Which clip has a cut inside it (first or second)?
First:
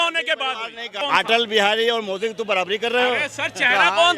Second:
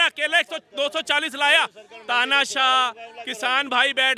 first